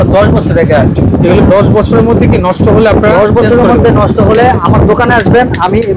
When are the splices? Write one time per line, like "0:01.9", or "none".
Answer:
none